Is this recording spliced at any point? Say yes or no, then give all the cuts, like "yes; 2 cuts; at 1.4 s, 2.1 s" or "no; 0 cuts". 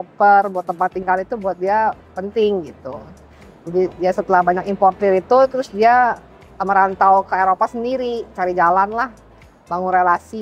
no; 0 cuts